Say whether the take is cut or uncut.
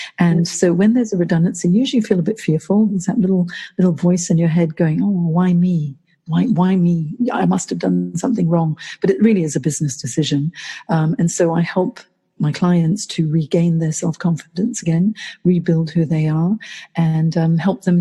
uncut